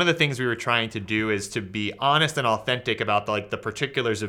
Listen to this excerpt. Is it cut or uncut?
uncut